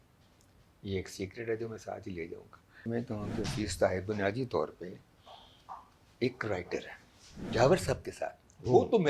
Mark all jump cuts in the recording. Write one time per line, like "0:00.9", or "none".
0:02.8
0:07.5